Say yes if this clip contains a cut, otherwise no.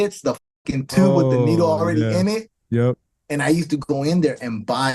no